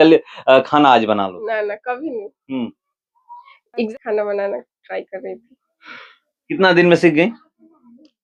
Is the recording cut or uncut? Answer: cut